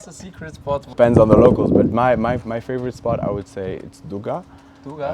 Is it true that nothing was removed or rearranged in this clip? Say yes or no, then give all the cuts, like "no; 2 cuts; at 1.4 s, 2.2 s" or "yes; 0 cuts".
no; 1 cut; at 0.9 s